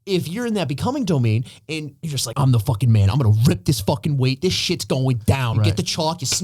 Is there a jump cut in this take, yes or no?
yes